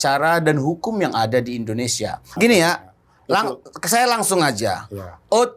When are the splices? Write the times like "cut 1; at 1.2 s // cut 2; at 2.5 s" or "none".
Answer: cut 1; at 2.3 s